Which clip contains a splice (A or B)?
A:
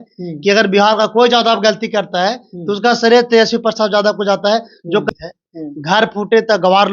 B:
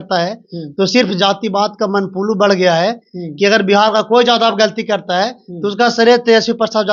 A